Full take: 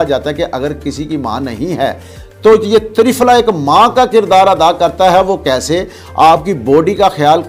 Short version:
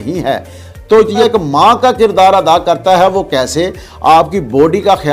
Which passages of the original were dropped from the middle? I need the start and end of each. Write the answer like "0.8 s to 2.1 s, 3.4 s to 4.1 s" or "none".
2.8 s to 3.4 s